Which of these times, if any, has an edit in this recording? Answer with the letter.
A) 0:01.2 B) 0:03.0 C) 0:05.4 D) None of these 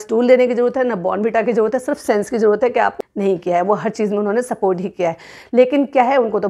B